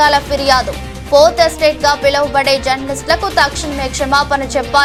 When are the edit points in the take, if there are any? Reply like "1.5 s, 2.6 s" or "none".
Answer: none